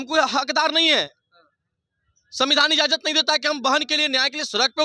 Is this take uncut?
yes; 0 cuts

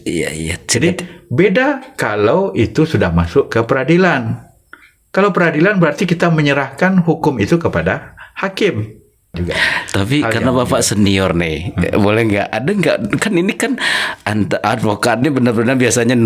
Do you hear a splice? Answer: yes; 1 cut; at 9.3 s

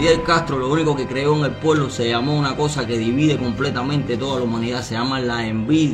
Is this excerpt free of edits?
yes; 0 cuts

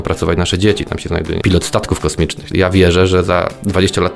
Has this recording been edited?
yes; 1 cut; at 2.5 s

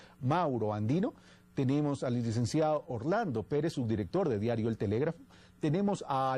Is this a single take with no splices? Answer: no; 1 cut; at 3.0 s

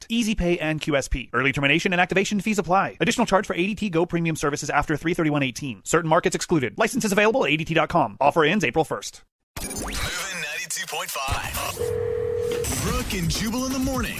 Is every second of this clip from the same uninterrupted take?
no; 1 cut; at 9.5 s

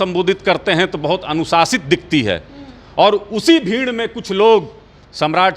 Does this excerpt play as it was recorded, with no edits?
yes; 0 cuts

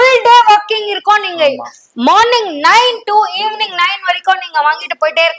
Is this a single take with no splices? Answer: yes; 0 cuts

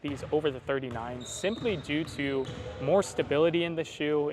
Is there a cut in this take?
no; 0 cuts

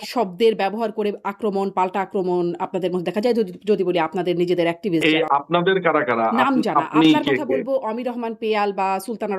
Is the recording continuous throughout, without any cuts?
no; 1 cut; at 5.0 s

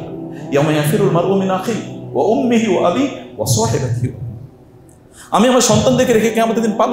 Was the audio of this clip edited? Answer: no; 0 cuts

